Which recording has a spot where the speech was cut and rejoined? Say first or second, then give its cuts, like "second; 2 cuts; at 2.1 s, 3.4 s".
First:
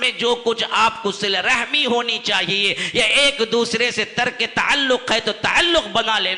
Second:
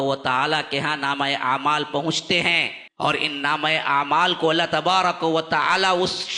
second; 1 cut; at 2.8 s